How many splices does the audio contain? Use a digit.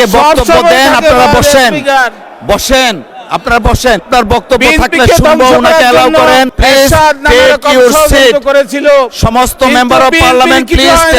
2